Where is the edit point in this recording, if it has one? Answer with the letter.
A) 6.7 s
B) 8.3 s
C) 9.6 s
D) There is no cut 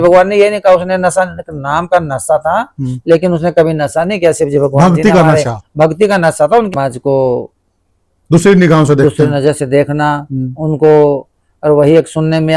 A